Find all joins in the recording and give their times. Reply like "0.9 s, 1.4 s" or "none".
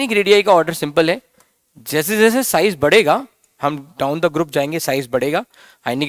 none